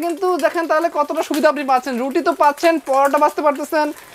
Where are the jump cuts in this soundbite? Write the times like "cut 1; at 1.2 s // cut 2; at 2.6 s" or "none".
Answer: none